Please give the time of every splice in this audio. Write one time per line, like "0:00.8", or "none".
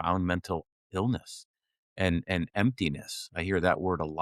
none